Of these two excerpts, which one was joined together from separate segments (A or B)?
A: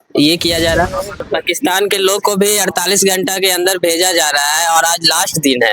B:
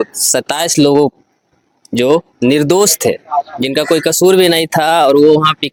A